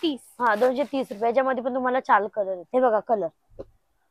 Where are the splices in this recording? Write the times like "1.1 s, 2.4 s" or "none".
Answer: 2.7 s